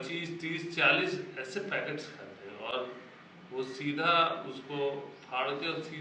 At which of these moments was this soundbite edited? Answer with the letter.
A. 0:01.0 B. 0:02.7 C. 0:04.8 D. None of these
D